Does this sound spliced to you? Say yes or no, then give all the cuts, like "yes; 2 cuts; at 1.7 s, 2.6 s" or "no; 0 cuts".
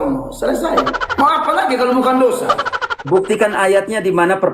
no; 0 cuts